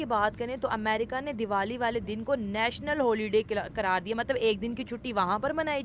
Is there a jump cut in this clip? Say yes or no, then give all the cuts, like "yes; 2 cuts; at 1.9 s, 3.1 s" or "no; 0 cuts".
no; 0 cuts